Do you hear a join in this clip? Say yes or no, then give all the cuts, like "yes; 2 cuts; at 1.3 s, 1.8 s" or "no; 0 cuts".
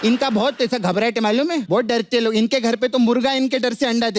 yes; 1 cut; at 1.6 s